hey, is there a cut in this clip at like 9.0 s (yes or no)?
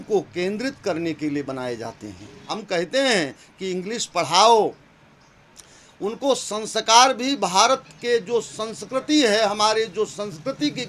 no